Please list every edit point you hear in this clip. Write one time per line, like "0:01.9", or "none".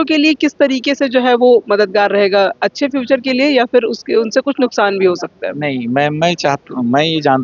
none